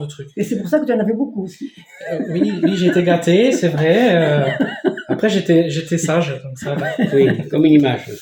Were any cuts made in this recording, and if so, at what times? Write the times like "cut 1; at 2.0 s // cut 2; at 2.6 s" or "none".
none